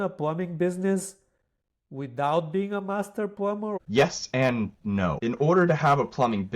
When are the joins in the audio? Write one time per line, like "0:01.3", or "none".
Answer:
0:03.8
0:05.2